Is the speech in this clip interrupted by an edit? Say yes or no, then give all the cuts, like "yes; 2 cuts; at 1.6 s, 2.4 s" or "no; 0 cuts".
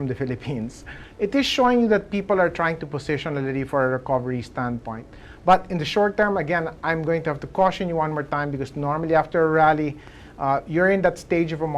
yes; 1 cut; at 1.0 s